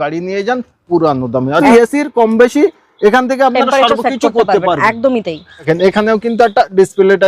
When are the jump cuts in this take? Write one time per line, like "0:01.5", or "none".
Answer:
0:01.6
0:05.6